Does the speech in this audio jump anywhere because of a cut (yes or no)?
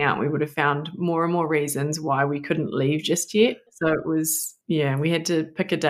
yes